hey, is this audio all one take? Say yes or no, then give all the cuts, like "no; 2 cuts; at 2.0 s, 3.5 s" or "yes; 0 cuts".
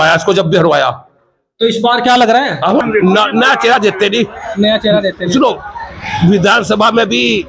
no; 1 cut; at 2.8 s